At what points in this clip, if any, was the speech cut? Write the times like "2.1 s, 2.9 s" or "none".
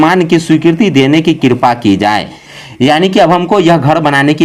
none